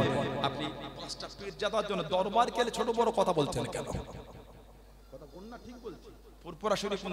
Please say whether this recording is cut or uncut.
uncut